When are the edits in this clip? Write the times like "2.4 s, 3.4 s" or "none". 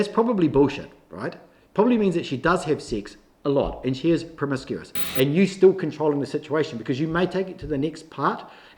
5.0 s